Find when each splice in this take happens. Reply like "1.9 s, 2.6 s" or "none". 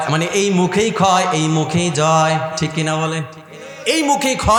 none